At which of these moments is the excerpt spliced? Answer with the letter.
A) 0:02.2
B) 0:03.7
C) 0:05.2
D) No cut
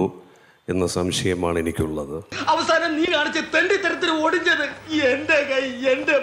A